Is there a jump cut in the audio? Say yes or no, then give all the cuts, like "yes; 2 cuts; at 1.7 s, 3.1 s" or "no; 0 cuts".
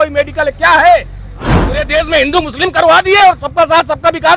yes; 1 cut; at 1.6 s